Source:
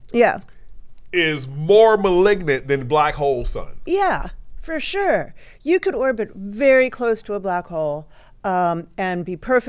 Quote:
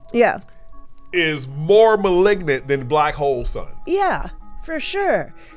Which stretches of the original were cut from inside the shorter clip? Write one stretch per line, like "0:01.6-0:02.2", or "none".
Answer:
none